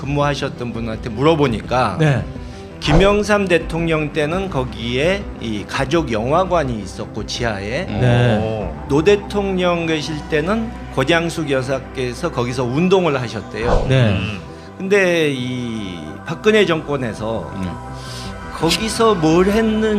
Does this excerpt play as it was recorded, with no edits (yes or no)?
no